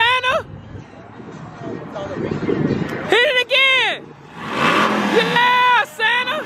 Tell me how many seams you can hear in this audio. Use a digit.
0